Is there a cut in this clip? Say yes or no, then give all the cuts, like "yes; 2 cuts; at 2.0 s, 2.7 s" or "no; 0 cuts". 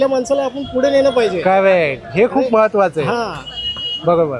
no; 0 cuts